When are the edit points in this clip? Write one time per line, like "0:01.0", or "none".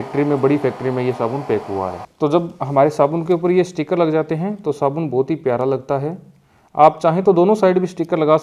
0:02.0